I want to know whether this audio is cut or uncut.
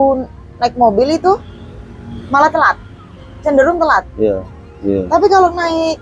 uncut